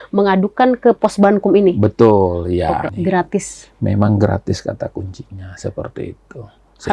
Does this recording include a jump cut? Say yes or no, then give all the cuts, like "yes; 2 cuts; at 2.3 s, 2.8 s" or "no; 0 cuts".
yes; 1 cut; at 2.9 s